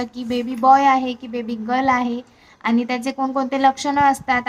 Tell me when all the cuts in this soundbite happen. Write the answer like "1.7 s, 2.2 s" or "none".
none